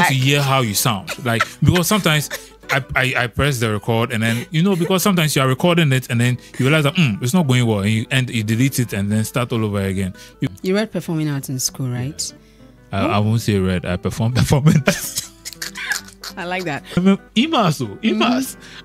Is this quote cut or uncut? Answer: cut